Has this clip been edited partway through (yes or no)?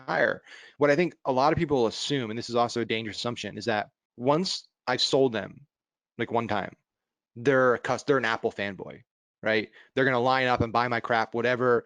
yes